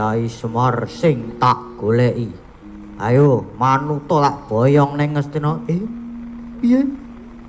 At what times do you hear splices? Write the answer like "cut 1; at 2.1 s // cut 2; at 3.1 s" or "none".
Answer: none